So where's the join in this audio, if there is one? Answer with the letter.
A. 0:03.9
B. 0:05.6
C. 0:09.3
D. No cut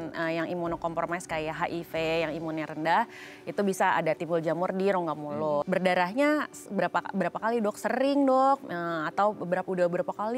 B